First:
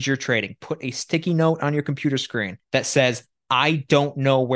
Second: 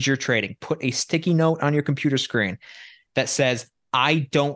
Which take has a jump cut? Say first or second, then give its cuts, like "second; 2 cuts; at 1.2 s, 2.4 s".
first; 1 cut; at 2.6 s